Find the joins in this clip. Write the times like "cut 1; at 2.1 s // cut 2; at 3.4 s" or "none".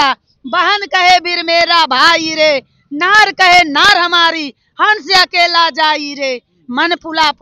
none

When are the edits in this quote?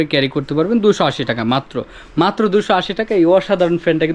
none

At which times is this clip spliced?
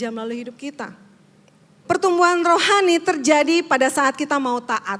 cut 1; at 1.8 s

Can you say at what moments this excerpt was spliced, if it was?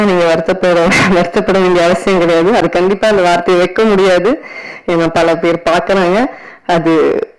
none

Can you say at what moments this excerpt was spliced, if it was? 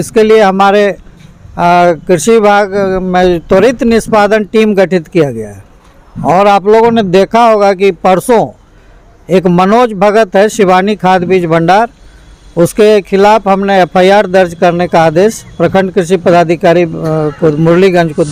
none

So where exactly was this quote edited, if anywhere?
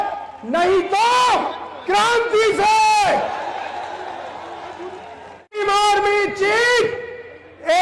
cut 1; at 5.6 s

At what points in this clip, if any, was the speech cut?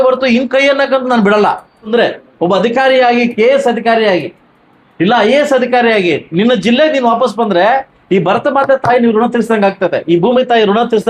cut 1; at 1.9 s

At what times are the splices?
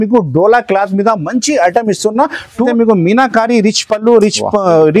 cut 1; at 2.7 s

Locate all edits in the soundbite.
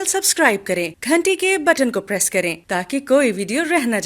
cut 1; at 0.9 s // cut 2; at 2.6 s

